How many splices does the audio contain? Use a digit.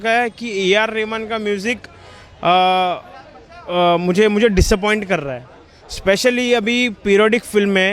0